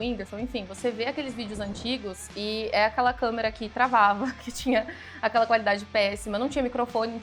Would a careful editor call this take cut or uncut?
uncut